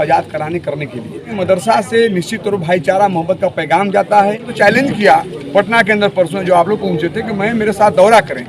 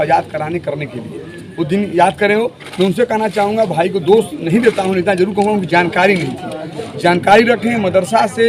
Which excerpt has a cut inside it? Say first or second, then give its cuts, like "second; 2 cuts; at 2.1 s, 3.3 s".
first; 2 cuts; at 1.4 s, 4.5 s